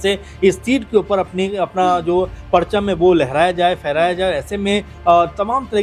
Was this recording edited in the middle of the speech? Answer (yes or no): no